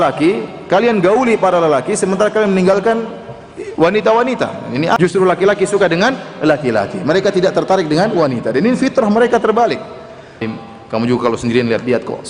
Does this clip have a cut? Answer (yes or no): yes